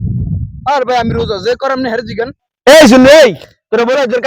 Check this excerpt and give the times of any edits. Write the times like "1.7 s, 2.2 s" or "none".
2.4 s